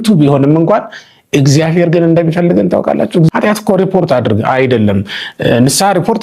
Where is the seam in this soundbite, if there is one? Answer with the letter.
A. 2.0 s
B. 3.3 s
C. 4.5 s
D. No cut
B